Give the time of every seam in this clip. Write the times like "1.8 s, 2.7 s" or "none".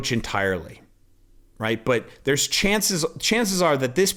none